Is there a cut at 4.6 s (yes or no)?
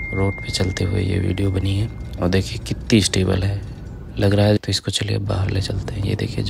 yes